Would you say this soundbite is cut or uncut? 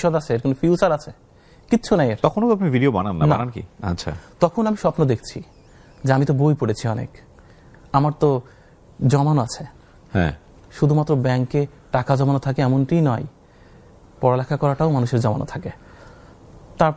uncut